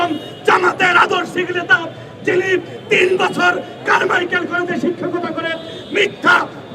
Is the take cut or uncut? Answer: uncut